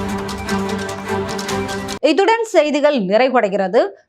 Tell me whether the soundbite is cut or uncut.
uncut